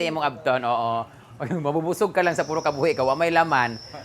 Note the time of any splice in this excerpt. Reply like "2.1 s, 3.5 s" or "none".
none